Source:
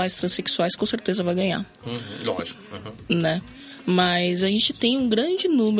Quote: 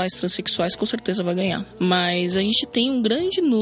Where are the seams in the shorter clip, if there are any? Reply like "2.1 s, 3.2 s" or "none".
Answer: 1.7 s